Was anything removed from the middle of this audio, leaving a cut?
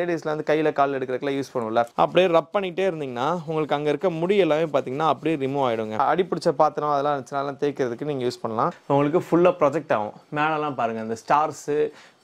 yes; 3 cuts; at 1.9 s, 6.0 s, 8.8 s

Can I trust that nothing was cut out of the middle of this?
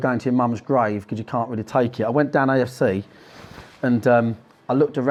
yes; 0 cuts

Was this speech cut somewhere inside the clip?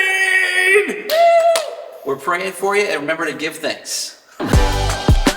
yes; 1 cut; at 4.5 s

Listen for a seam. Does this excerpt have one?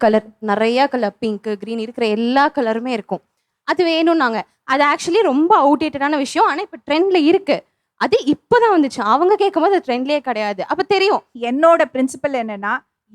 yes; 1 cut; at 11.3 s

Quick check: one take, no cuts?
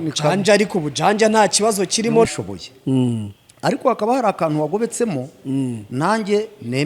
no; 1 cut; at 2.3 s

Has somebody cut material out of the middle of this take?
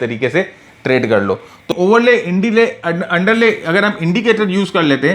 yes; 1 cut; at 1.7 s

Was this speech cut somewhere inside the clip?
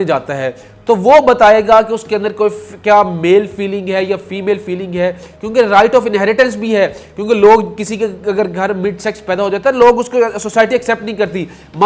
no; 0 cuts

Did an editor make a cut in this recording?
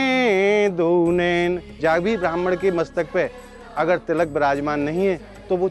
yes; 1 cut; at 1.7 s

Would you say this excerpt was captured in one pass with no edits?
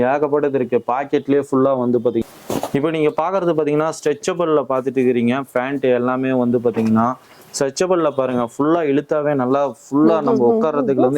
no; 1 cut; at 2.2 s

